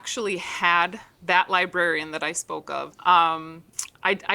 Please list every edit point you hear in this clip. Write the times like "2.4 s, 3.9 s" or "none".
2.9 s